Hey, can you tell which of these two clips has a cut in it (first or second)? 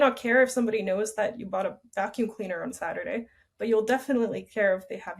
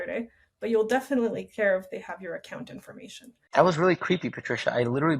second